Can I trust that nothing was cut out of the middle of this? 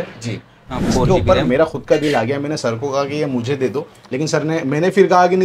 no; 1 cut; at 1.1 s

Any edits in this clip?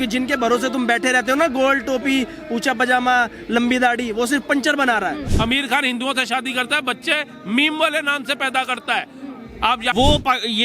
yes; 2 cuts; at 5.3 s, 9.9 s

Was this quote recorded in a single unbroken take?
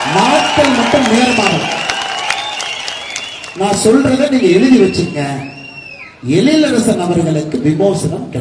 yes; 0 cuts

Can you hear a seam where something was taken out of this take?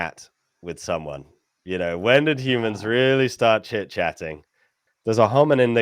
yes; 1 cut; at 4.7 s

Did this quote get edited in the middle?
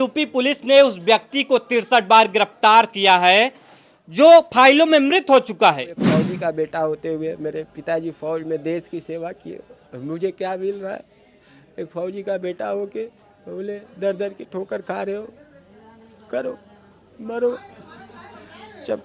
yes; 1 cut; at 6.0 s

